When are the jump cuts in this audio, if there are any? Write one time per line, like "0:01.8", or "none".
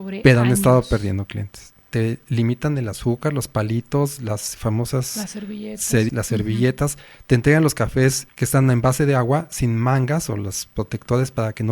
0:01.9
0:06.1
0:08.3